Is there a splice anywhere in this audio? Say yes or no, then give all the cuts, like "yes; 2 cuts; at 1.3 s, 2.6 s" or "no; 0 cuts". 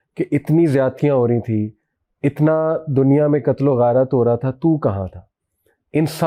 no; 0 cuts